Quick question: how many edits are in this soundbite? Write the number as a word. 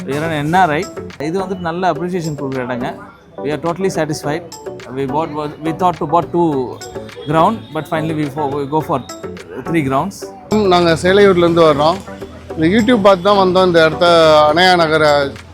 two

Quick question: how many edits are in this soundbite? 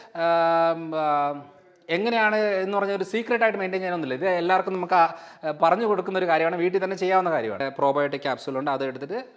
one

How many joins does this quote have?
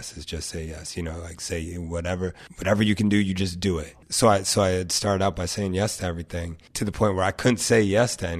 three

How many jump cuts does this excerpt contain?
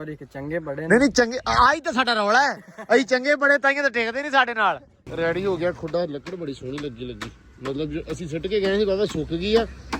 one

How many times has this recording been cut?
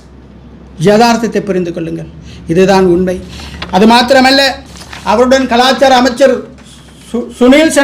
zero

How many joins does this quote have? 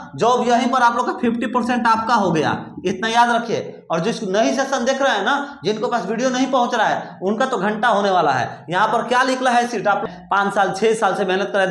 one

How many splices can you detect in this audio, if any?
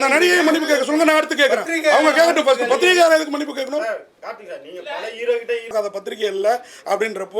one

